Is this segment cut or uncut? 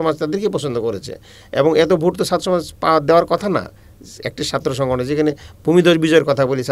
uncut